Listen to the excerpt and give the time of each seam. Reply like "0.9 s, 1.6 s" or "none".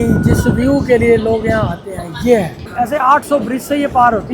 2.7 s